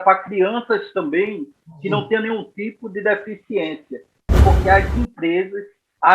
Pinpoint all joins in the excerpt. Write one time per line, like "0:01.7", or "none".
0:04.2